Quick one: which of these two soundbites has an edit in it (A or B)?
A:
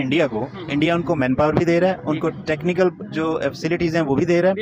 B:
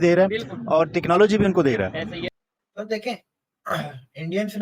B